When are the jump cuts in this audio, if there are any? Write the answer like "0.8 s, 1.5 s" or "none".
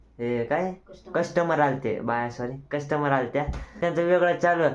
3.8 s